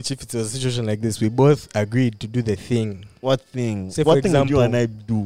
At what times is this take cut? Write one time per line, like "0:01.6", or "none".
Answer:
0:03.2